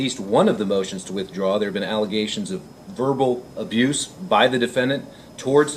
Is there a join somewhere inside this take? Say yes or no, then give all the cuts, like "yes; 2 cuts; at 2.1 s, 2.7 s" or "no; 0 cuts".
no; 0 cuts